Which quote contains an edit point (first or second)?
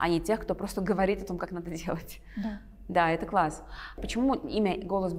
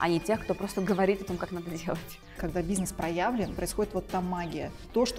second